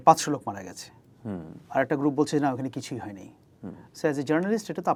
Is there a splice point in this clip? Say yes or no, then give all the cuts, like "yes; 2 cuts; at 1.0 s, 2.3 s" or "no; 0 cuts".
no; 0 cuts